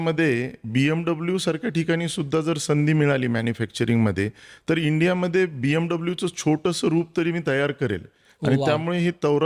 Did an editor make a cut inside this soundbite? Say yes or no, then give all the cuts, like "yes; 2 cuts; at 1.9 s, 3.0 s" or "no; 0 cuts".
no; 0 cuts